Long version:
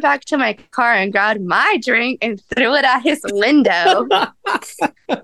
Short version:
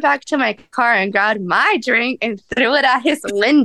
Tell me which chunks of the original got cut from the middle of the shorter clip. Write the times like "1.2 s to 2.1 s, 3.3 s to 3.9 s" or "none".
none